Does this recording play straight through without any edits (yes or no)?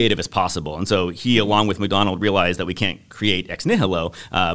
yes